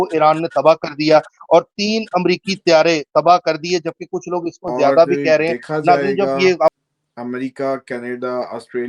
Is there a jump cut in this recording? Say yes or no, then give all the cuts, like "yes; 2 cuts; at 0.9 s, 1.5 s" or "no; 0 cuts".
yes; 1 cut; at 6.7 s